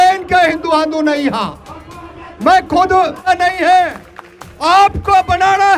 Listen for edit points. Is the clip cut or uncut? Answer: cut